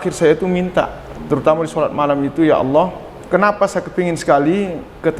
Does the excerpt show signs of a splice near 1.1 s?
no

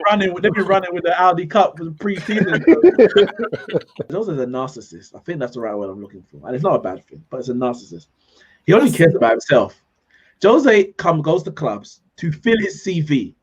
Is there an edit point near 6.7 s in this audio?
no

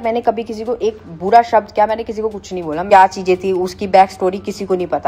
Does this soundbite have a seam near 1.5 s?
no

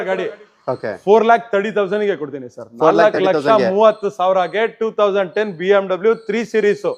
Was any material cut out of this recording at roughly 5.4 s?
no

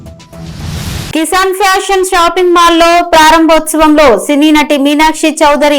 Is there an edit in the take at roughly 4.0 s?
no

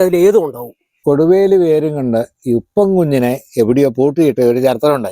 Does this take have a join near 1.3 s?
yes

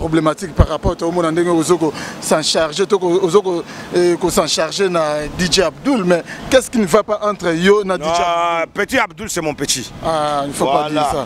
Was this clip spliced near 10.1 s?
no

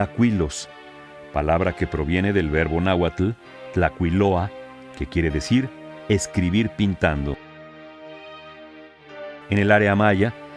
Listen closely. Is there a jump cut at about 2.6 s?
yes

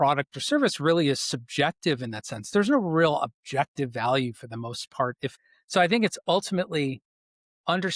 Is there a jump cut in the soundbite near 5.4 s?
yes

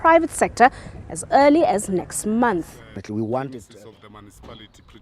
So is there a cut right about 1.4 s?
no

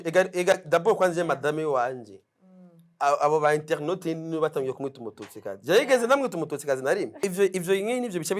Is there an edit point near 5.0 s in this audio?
no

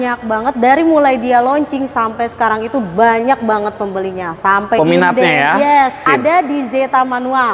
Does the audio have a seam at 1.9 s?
no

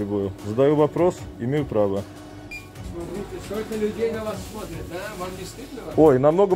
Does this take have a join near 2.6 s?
yes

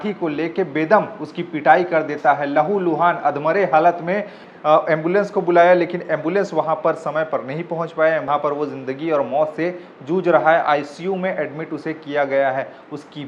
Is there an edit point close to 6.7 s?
no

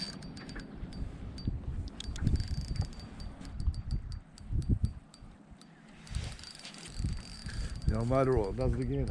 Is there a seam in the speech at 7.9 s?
no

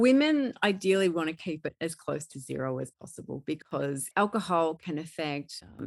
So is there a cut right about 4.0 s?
yes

